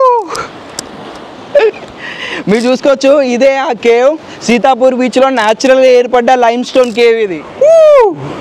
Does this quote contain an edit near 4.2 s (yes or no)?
no